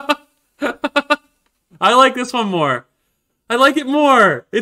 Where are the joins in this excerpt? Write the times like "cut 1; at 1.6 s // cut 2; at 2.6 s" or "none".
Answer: cut 1; at 1.6 s